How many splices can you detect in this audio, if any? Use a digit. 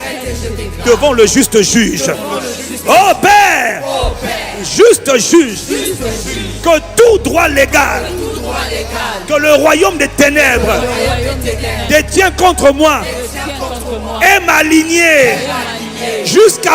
0